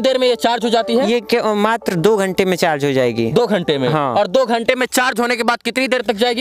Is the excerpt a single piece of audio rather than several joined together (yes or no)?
yes